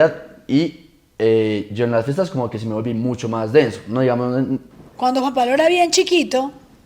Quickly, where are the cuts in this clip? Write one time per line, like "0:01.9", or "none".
0:04.7